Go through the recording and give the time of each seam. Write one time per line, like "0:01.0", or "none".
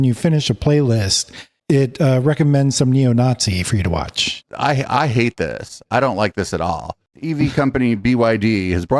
0:04.4
0:07.0